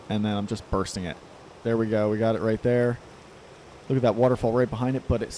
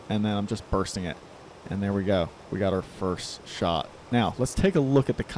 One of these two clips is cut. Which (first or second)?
first